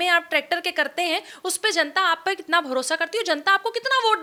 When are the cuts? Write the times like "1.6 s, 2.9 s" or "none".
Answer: none